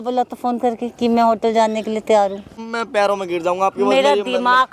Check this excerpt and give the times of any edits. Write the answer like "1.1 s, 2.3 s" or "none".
2.6 s

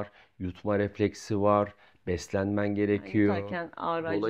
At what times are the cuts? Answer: none

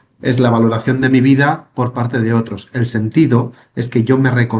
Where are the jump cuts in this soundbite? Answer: none

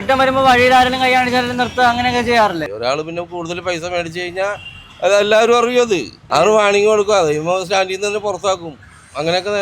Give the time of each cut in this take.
2.6 s, 6.2 s

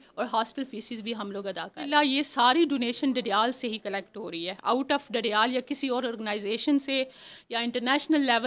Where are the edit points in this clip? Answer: 1.9 s

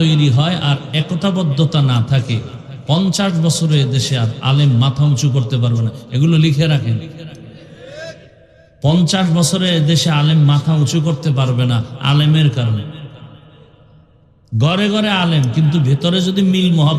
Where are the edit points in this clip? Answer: none

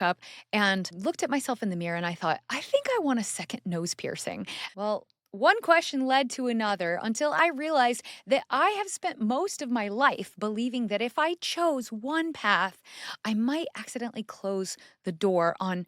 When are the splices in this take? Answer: 0.9 s, 4.5 s

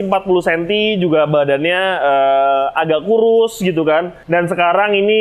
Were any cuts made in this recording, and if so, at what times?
4.2 s

